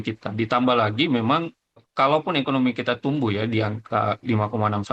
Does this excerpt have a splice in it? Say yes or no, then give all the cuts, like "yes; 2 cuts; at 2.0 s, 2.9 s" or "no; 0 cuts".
yes; 1 cut; at 1.9 s